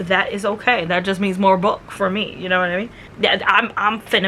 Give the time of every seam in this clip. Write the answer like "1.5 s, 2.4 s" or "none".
3.0 s